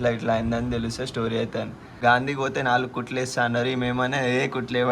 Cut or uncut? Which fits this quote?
cut